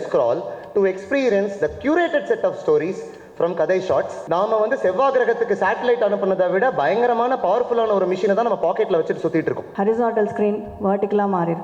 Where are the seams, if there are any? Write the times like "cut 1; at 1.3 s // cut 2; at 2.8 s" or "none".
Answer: cut 1; at 4.2 s // cut 2; at 9.7 s